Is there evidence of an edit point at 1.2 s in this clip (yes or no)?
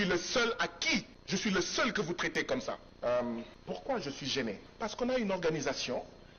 yes